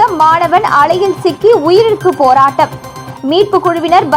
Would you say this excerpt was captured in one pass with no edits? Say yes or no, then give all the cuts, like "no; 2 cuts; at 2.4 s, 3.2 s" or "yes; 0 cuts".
yes; 0 cuts